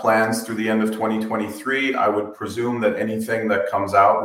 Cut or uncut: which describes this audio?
uncut